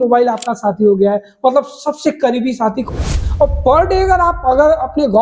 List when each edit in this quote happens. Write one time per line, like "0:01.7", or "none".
0:02.9